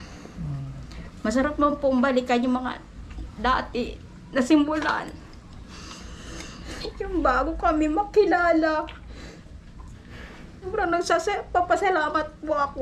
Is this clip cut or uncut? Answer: cut